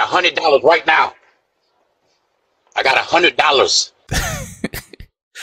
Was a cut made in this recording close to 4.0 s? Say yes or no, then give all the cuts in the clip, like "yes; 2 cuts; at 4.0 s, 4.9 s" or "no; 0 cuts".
yes; 1 cut; at 4.0 s